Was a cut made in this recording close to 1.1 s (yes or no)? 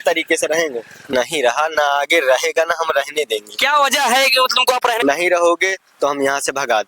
yes